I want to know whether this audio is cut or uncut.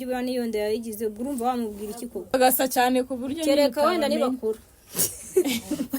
cut